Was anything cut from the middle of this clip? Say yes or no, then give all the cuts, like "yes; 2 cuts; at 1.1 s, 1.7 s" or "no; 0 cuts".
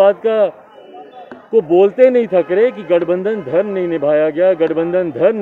no; 0 cuts